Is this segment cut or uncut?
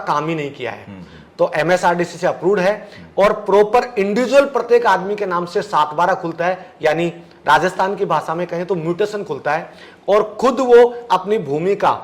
uncut